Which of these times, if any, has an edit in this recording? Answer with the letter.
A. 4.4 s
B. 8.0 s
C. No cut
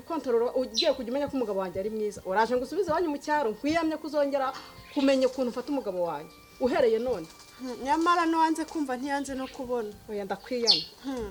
C